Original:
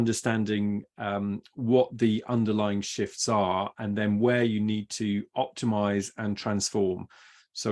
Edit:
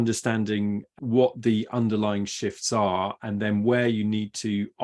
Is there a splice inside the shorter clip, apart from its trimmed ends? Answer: yes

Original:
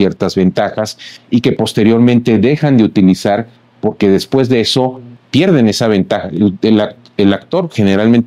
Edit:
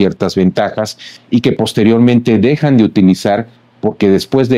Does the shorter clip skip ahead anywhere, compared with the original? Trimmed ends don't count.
no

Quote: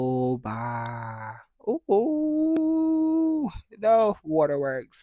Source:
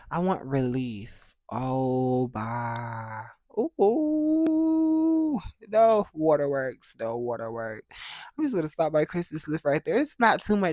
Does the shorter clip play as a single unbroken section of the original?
yes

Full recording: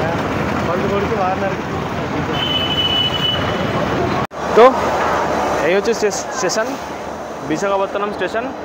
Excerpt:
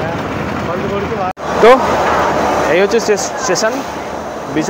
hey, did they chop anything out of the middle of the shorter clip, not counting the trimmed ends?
yes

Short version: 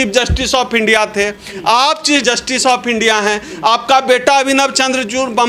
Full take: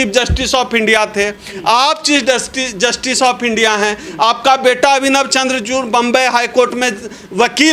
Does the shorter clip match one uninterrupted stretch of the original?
no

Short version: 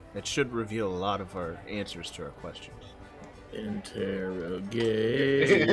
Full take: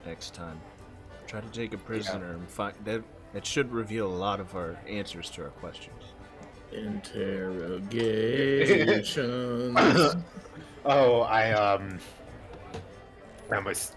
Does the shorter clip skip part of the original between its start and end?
no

